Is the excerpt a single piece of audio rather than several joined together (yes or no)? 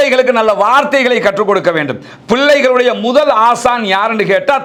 yes